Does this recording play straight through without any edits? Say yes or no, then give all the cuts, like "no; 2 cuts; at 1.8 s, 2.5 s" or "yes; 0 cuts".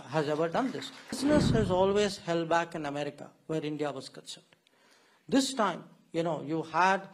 no; 1 cut; at 1.2 s